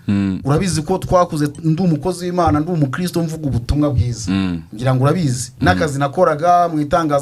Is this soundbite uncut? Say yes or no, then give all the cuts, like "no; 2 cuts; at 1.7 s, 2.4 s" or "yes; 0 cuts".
yes; 0 cuts